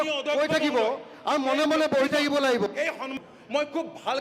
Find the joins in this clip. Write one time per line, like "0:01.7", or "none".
0:03.2